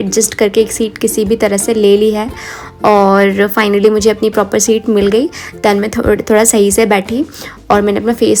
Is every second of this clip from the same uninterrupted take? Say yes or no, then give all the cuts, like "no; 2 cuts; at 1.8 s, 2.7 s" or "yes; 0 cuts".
yes; 0 cuts